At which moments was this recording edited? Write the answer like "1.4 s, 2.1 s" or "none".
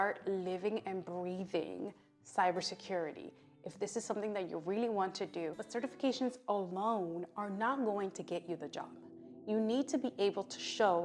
5.6 s